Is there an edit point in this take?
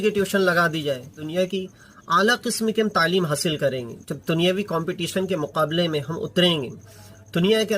yes; 1 cut; at 1.2 s

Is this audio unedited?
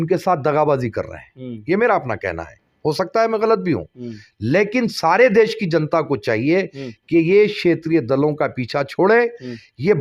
yes; 0 cuts

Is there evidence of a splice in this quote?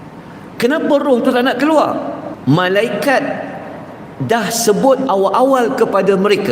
yes; 1 cut; at 2.3 s

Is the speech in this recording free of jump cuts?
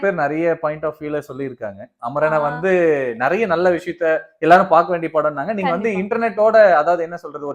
yes; 0 cuts

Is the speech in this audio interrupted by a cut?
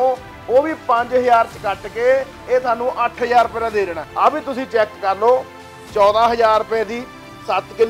no; 0 cuts

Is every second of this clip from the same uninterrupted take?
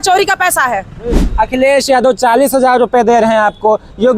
no; 1 cut; at 1.2 s

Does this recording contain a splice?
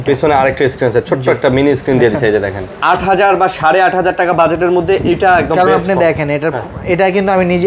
yes; 1 cut; at 2.8 s

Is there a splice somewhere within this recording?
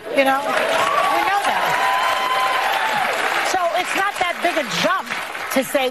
yes; 1 cut; at 2.1 s

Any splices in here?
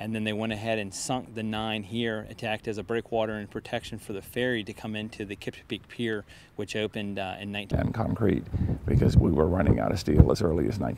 no; 0 cuts

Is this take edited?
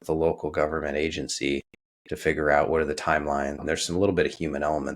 yes; 1 cut; at 3.6 s

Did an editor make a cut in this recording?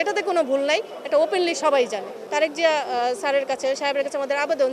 yes; 1 cut; at 2.3 s

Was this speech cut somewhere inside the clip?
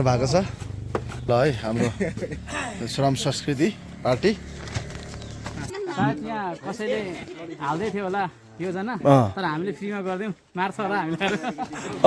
yes; 2 cuts; at 1.2 s, 5.7 s

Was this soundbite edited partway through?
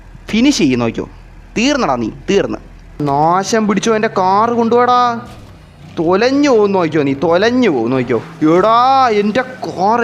yes; 1 cut; at 3.0 s

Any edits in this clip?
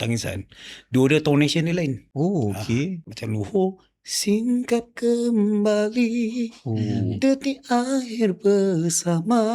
yes; 2 cuts; at 2.0 s, 3.1 s

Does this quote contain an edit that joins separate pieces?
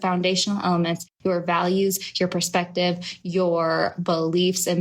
yes; 1 cut; at 1.1 s

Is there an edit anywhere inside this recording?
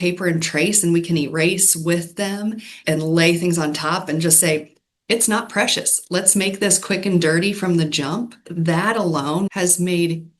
yes; 2 cuts; at 8.4 s, 9.5 s

